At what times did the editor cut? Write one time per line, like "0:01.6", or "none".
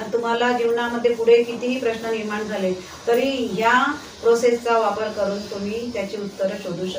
none

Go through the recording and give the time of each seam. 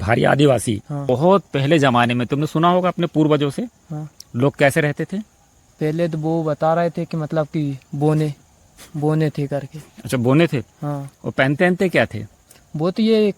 0:01.0

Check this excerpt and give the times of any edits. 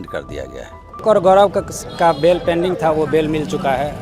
0:01.0

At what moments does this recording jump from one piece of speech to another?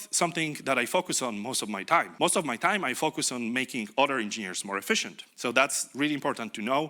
0:02.1
0:05.2

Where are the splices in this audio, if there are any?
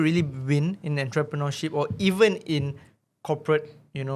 none

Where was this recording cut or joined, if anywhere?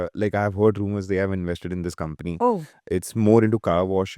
0:02.7

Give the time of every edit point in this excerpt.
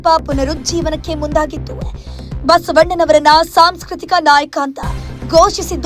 none

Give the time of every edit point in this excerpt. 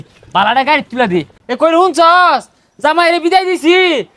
0:01.3

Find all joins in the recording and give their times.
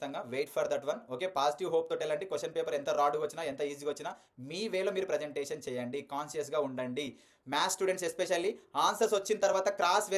none

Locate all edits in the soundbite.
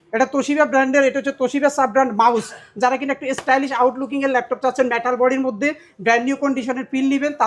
none

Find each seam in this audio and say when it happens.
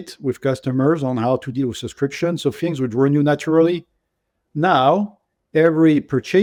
none

